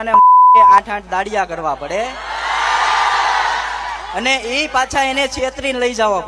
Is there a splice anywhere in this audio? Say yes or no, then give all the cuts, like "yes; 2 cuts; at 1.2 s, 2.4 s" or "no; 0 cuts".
yes; 1 cut; at 0.9 s